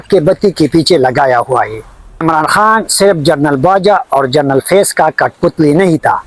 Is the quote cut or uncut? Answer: cut